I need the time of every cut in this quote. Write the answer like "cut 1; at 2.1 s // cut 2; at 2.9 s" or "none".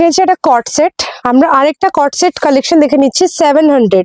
cut 1; at 1.1 s